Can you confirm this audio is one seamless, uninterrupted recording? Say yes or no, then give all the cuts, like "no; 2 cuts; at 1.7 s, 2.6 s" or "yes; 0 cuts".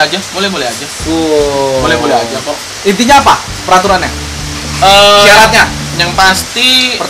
yes; 0 cuts